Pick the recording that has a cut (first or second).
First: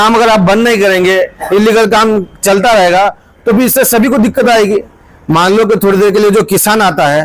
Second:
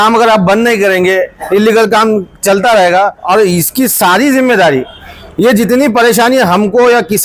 second